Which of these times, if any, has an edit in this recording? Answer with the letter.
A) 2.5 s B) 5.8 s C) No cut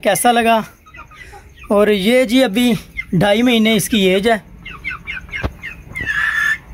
C